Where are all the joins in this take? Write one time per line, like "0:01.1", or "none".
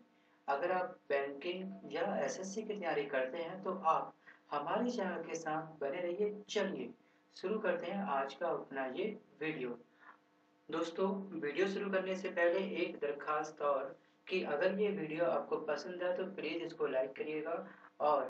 0:00.9